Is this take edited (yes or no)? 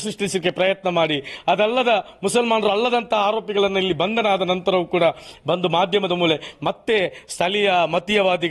no